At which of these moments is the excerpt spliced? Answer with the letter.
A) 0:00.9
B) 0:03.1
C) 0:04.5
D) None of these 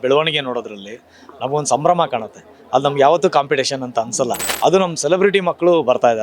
C